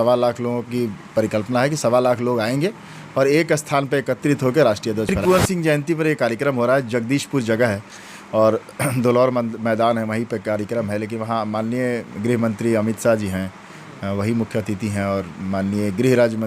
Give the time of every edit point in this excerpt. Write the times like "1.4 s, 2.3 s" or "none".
5.2 s